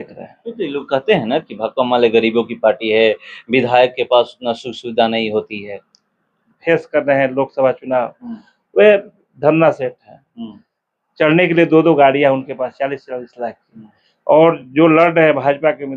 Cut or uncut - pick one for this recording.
cut